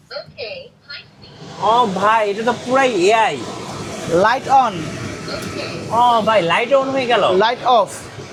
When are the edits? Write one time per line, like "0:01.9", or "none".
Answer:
none